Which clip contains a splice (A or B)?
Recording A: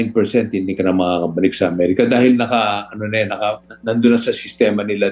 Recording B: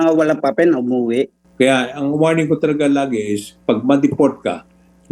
B